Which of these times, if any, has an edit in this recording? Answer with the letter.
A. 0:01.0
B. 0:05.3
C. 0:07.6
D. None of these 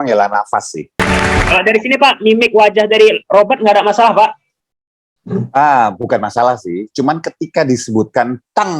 A